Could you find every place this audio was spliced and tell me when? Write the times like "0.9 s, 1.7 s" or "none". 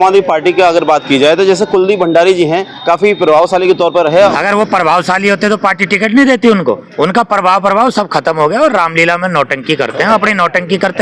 2.7 s, 4.3 s, 6.9 s